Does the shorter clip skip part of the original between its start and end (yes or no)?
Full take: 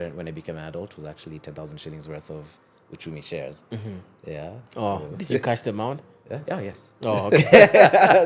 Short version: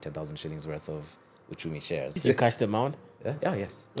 yes